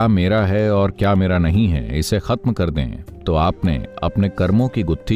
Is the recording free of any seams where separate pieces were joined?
yes; 0 cuts

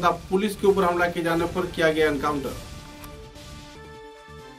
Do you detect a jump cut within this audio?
no; 0 cuts

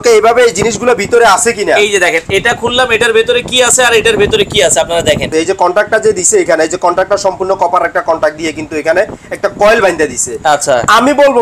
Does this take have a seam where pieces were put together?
yes; 1 cut; at 5.3 s

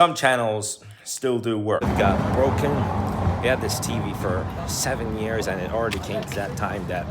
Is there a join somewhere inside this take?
yes; 1 cut; at 1.8 s

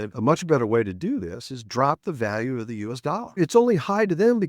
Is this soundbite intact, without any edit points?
no; 1 cut; at 3.4 s

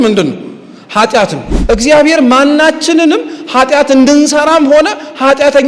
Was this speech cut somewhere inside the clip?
yes; 1 cut; at 1.5 s

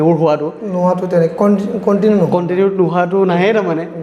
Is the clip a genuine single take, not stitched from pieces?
yes; 0 cuts

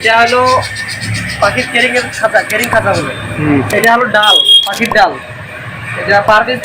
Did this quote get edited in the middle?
yes; 1 cut; at 3.7 s

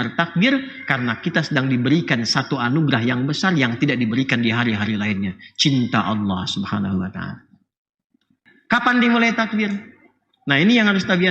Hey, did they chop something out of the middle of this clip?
yes; 1 cut; at 8.5 s

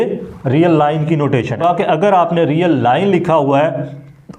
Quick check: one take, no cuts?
no; 1 cut; at 1.6 s

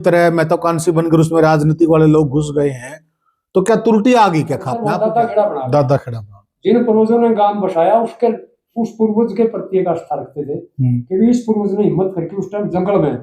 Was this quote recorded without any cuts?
no; 1 cut; at 5.0 s

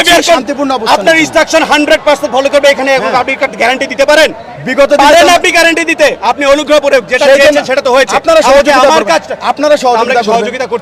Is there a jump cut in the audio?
no; 0 cuts

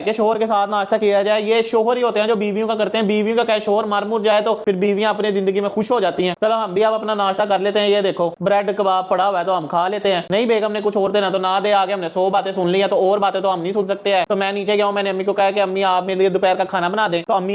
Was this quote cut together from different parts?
no; 0 cuts

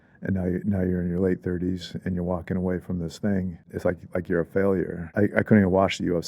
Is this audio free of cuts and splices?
no; 2 cuts; at 3.7 s, 5.0 s

